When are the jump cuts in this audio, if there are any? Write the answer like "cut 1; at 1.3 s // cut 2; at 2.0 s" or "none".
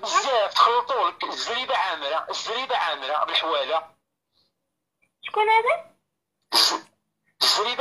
none